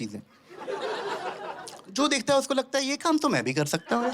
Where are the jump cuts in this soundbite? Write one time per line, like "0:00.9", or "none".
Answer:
0:01.8